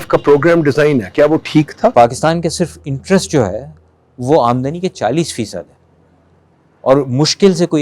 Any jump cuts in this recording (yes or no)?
yes